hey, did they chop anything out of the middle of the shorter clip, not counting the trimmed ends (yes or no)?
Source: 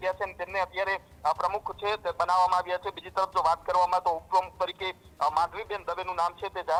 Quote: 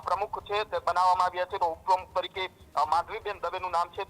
yes